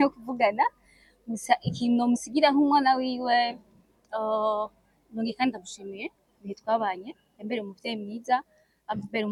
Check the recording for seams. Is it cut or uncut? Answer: uncut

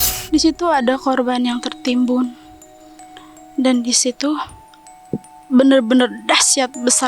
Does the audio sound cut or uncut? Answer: uncut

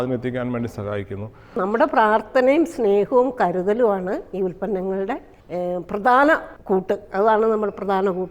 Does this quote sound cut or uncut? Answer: cut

